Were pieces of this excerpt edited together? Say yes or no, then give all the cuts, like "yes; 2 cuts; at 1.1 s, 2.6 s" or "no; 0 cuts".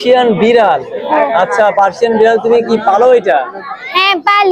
no; 0 cuts